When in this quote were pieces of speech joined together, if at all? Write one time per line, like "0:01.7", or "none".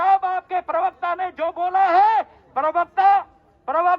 none